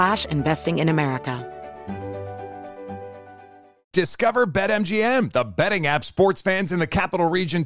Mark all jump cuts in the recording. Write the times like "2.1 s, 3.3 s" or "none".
1.4 s